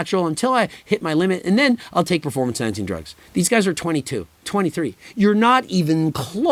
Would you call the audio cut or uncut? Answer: uncut